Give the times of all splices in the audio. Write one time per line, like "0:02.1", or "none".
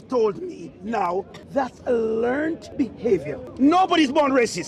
0:01.4
0:02.8